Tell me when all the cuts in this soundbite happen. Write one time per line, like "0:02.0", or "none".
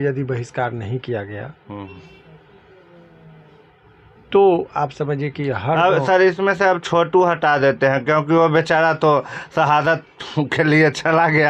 none